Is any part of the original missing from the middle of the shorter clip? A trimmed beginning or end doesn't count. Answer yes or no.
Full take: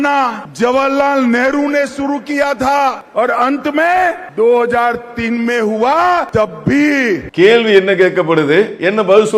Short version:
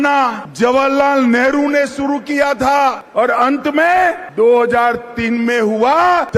no